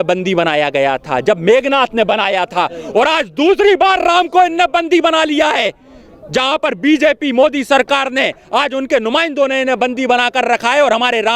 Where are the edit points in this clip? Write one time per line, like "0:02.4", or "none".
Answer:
none